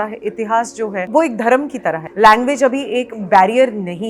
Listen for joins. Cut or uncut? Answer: cut